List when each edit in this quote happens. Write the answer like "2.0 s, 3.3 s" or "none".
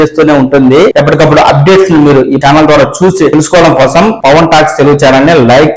0.9 s, 2.4 s, 3.3 s, 4.2 s